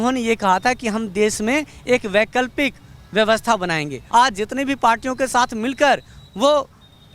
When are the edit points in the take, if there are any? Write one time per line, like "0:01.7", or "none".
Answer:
0:04.0